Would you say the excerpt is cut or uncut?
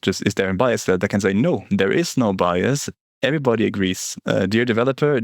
uncut